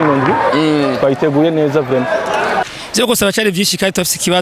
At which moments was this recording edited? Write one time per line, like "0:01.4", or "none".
0:02.6